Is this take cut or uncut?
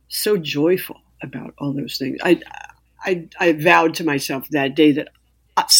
uncut